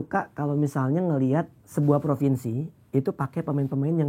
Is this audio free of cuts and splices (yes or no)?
no